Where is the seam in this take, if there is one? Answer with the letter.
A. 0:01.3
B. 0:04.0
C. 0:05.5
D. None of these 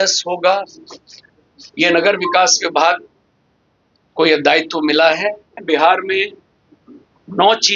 C